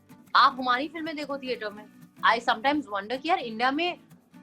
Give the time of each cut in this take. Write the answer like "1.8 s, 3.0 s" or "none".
2.2 s